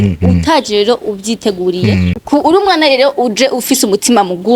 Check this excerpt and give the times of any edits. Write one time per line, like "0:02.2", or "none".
0:02.2